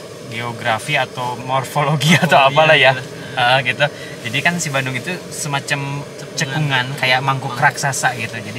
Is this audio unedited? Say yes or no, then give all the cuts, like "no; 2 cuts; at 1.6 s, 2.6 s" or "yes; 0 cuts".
no; 1 cut; at 1.4 s